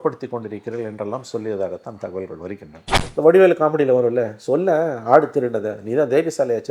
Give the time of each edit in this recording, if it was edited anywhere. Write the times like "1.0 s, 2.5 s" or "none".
3.0 s